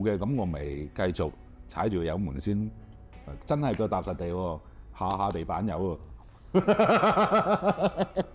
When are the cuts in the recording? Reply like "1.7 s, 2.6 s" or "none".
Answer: none